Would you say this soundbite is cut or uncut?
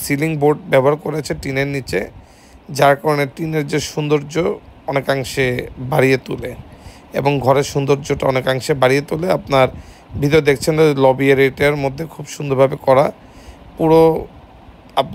uncut